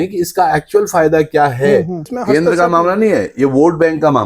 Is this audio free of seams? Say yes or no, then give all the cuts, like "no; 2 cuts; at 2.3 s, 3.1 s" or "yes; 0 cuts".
no; 1 cut; at 2.1 s